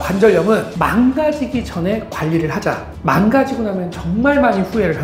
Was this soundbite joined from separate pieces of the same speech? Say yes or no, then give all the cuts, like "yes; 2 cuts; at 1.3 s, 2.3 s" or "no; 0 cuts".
no; 0 cuts